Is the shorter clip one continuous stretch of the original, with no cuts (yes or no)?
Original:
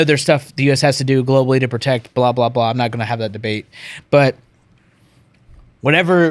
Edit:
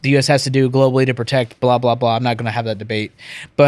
yes